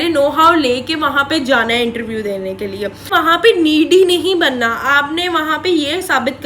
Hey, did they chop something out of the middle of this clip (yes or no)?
yes